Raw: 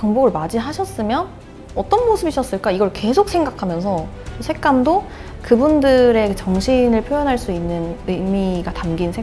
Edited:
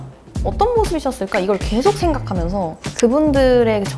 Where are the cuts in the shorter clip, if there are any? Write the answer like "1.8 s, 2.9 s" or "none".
2.8 s